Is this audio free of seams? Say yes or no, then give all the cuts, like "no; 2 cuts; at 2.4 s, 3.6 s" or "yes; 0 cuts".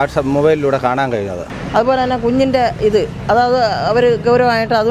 no; 1 cut; at 1.5 s